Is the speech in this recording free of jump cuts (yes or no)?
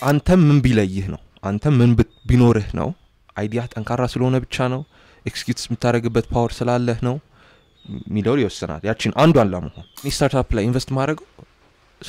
no